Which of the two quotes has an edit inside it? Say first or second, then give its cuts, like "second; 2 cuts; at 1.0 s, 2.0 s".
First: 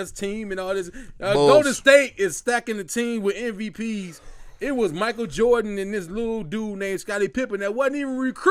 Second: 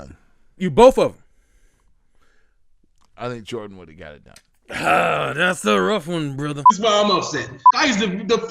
second; 1 cut; at 6.6 s